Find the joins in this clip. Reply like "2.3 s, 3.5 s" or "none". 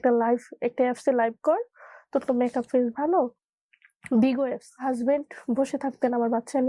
3.4 s, 4.7 s

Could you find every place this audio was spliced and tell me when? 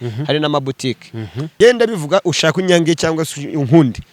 1.5 s

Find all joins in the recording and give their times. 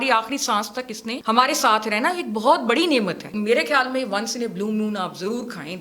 1.1 s, 3.3 s

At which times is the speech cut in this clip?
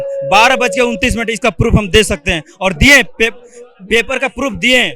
none

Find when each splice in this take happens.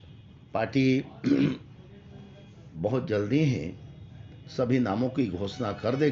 none

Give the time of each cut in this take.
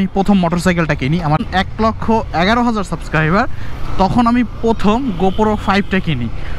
1.5 s

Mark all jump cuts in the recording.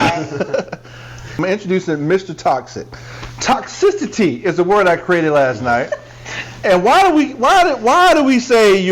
1.3 s

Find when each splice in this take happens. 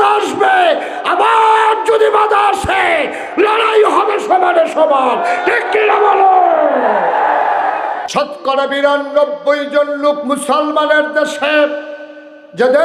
8.0 s

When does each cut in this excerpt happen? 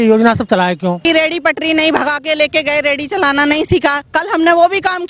1.0 s

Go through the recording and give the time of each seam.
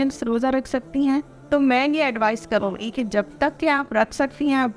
none

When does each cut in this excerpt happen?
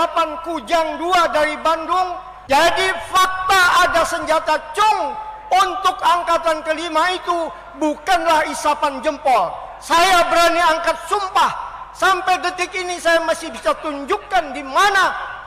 2.3 s

